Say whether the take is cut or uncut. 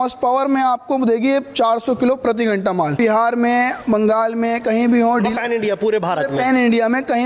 cut